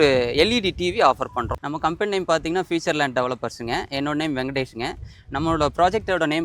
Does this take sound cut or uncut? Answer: cut